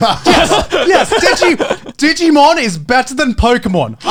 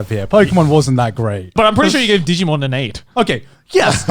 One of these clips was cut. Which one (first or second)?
second